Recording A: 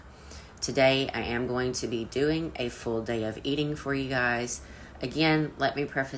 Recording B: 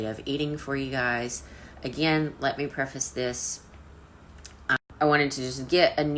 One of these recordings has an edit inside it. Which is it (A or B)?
B